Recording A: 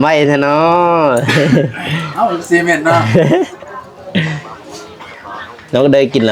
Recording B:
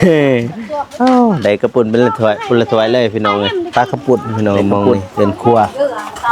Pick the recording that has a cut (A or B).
B